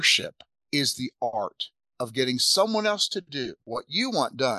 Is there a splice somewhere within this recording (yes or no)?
yes